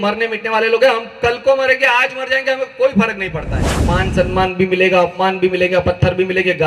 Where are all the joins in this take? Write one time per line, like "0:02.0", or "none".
0:03.8